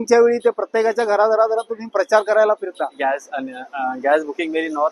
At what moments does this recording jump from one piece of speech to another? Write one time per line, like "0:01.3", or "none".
0:03.0

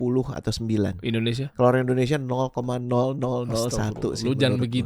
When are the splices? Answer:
0:01.5

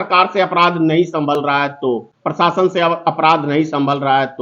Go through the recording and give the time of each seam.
0:02.1

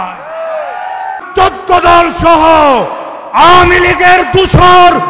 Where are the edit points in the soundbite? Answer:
0:01.1

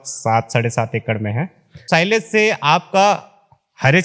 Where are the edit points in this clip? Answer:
0:01.7

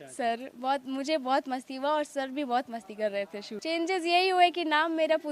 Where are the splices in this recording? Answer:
0:03.5

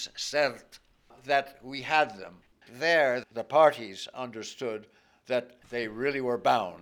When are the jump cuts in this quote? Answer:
0:02.6
0:05.6

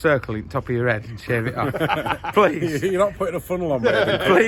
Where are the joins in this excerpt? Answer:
none

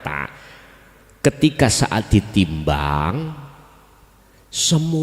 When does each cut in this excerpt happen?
none

